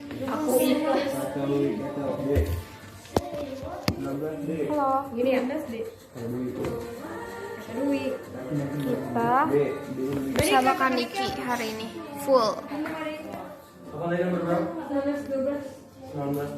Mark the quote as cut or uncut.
uncut